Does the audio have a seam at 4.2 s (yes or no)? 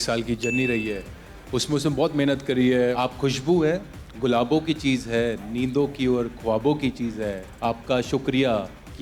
no